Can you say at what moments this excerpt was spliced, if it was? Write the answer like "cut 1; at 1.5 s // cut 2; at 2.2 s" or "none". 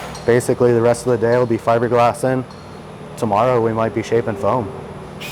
none